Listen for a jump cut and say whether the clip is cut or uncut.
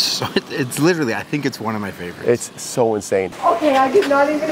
cut